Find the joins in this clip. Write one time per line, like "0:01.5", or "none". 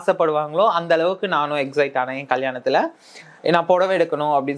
none